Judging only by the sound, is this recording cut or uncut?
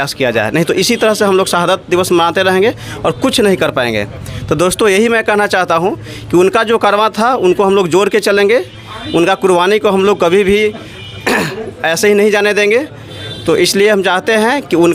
uncut